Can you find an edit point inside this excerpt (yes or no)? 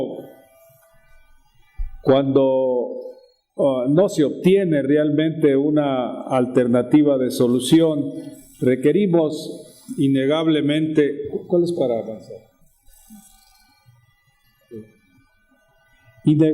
yes